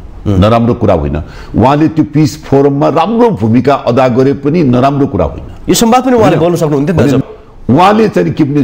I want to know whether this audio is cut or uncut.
cut